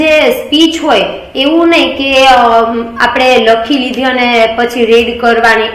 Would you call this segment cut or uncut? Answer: uncut